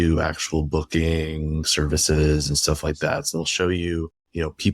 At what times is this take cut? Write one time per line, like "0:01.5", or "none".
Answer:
0:03.3